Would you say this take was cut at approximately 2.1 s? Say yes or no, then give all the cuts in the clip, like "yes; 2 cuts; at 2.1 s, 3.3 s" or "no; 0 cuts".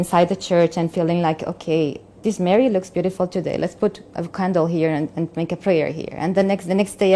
yes; 1 cut; at 2.1 s